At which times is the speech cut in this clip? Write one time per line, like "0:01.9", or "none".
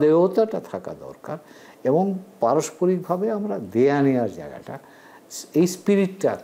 none